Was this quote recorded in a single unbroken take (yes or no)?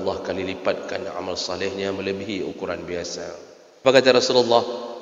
no